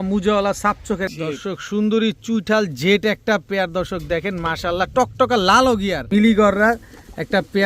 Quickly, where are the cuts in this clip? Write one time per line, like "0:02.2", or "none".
0:01.1
0:06.0